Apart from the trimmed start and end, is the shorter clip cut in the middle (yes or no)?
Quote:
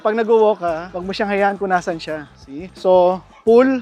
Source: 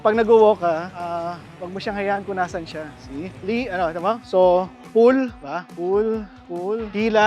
yes